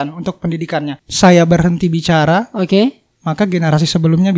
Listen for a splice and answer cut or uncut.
cut